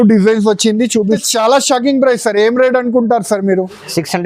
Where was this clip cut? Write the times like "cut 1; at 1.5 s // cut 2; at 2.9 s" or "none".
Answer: cut 1; at 1.1 s